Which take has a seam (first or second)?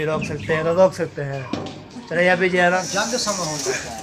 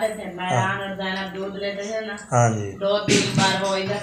first